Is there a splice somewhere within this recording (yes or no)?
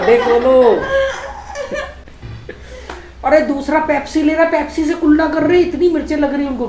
no